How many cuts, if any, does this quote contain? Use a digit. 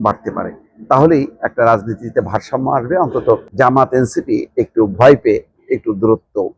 1